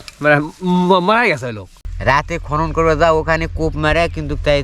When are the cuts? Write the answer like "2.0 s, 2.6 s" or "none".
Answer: 1.8 s